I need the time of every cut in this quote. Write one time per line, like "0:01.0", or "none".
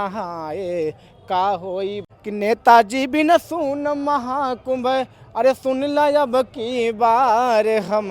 0:02.1